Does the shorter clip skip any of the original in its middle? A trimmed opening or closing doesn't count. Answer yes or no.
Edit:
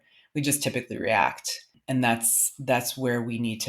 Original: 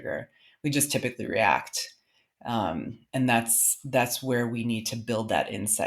yes